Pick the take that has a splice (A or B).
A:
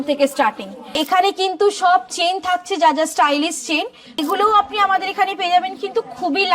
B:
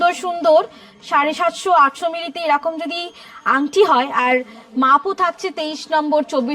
A